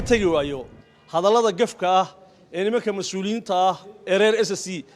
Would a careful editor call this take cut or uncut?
uncut